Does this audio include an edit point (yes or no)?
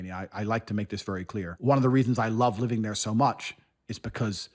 yes